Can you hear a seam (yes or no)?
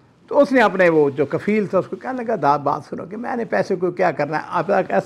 no